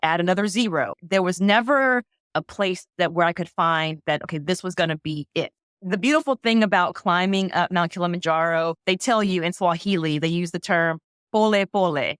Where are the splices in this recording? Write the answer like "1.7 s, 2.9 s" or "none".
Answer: 1.0 s, 2.2 s, 5.6 s, 8.8 s

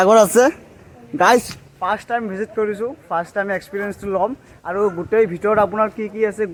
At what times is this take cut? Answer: none

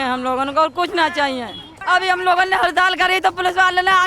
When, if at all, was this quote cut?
1.7 s

